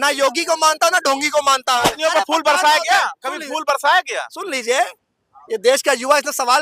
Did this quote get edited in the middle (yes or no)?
yes